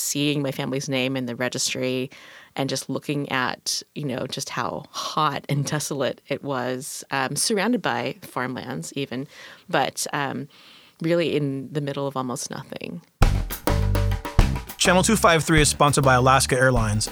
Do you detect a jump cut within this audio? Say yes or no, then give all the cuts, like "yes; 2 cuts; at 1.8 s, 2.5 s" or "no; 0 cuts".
yes; 1 cut; at 13.2 s